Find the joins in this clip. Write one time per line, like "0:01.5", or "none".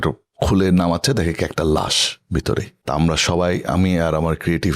0:02.7